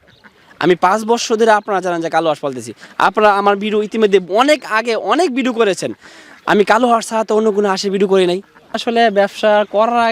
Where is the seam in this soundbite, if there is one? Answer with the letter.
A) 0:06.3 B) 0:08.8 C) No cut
B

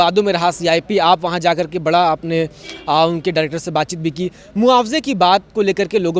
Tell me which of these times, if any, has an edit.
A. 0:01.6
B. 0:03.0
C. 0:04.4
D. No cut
D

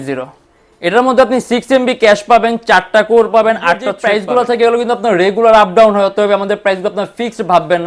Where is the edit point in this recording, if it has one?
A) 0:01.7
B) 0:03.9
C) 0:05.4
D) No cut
B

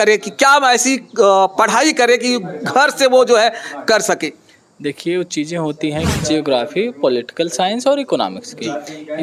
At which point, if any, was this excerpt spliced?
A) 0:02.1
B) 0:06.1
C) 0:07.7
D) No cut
B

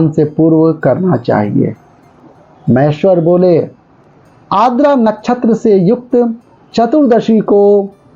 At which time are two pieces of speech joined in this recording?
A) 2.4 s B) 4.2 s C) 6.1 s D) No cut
A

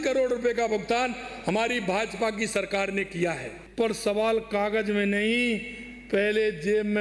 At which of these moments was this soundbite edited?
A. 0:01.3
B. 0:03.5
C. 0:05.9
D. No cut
B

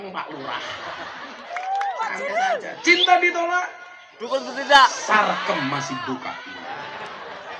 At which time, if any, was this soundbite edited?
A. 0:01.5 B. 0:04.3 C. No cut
A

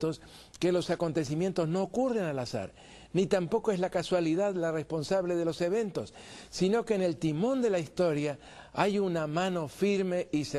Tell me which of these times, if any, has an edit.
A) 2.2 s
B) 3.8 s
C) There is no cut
B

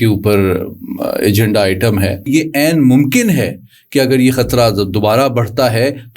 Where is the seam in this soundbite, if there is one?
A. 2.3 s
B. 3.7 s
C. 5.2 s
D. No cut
A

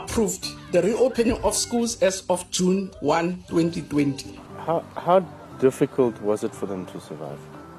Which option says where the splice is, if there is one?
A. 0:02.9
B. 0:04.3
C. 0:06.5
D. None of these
B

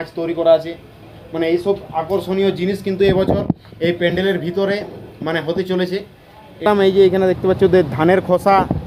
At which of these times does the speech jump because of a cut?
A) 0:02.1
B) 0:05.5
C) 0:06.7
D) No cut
C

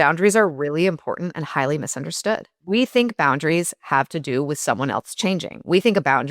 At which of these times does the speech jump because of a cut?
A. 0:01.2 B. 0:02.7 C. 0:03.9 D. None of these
B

